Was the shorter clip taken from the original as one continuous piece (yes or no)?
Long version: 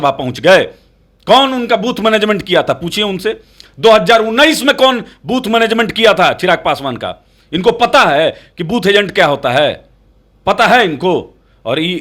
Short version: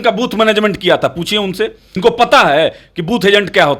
no